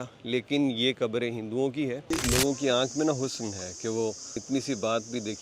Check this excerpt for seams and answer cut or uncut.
cut